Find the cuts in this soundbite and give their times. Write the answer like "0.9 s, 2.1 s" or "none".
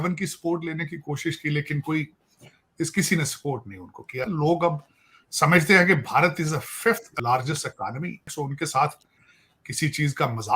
4.2 s, 7.1 s, 8.3 s